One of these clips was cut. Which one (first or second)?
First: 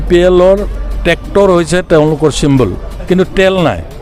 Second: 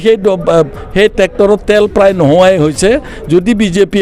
first